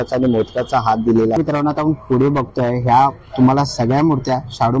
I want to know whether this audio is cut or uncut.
cut